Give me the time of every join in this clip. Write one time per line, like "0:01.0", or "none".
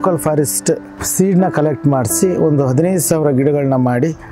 0:01.0

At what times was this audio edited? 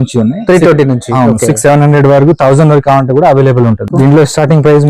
0:03.9

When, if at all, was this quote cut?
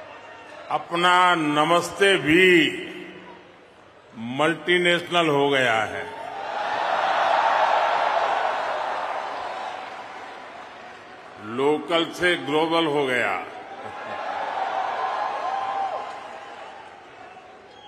none

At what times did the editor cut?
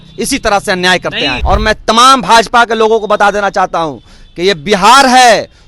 0:01.3

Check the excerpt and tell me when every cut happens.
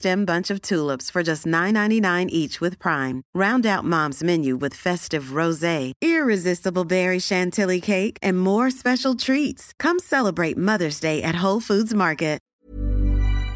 0:12.5

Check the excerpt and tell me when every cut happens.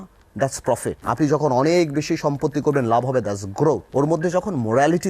0:01.0
0:03.8

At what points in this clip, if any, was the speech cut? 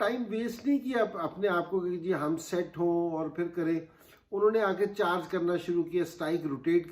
none

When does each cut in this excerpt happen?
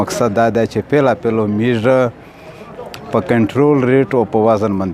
none

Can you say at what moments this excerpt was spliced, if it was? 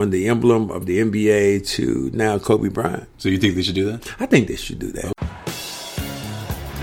0:05.2

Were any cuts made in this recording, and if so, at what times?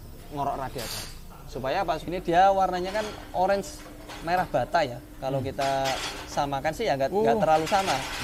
0:02.0

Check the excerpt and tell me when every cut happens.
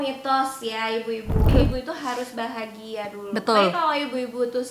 0:01.5

